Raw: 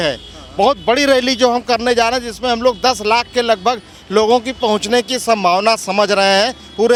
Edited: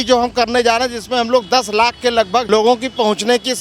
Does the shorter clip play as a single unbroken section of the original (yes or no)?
no